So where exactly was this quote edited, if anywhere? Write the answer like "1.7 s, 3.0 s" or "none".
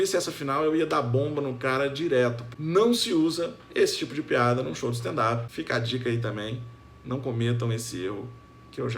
2.6 s, 5.4 s